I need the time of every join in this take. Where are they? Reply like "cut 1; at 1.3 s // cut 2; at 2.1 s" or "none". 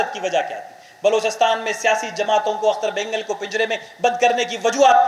none